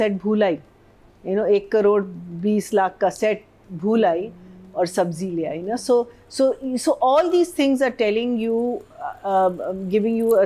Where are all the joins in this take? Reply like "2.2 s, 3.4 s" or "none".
none

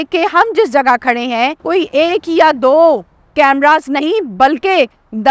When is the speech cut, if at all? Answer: 1.6 s

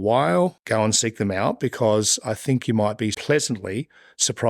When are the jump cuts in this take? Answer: 3.2 s

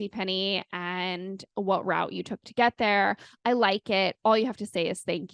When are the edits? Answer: none

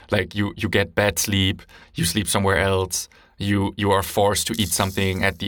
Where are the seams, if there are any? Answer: none

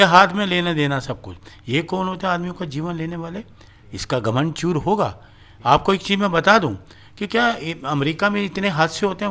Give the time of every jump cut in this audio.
none

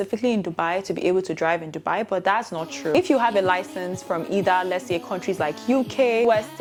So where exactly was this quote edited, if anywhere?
none

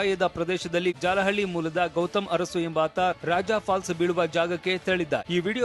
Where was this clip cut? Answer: 1.0 s

